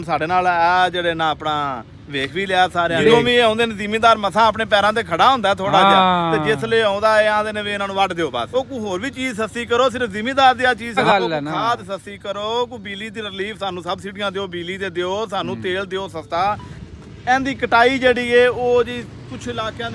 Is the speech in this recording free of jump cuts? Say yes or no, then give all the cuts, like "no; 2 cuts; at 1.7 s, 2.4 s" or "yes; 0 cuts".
no; 4 cuts; at 3.0 s, 8.5 s, 11.0 s, 16.7 s